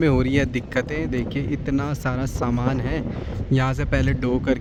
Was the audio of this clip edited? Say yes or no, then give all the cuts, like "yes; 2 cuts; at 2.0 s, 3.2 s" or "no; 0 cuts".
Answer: no; 0 cuts